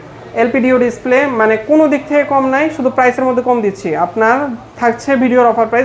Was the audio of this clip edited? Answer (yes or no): no